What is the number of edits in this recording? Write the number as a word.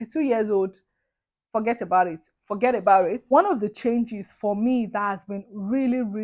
one